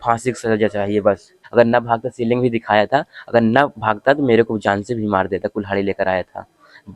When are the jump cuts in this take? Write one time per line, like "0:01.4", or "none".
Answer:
0:01.4

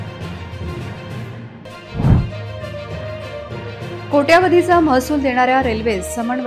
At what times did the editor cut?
0:01.1

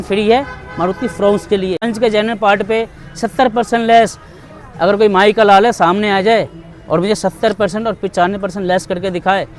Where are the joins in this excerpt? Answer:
0:01.9

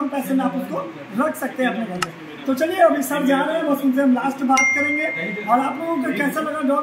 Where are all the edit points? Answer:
none

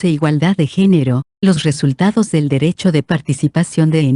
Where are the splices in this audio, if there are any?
0:01.5

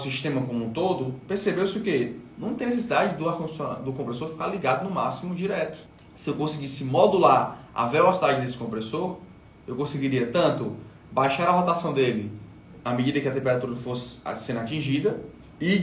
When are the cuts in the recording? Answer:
0:12.7

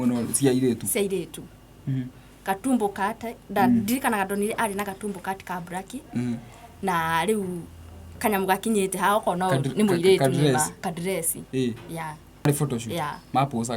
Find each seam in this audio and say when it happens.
0:12.5

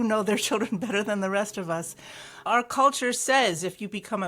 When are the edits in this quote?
0:02.5

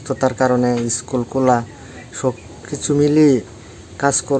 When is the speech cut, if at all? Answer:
none

